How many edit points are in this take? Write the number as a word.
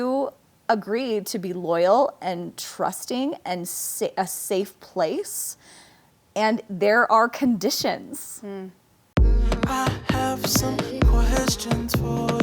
one